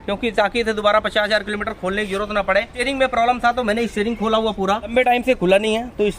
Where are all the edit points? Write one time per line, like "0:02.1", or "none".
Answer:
0:02.7
0:04.9